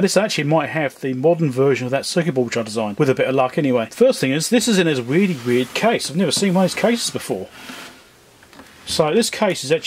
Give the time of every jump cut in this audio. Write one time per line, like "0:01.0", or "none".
0:02.9
0:03.9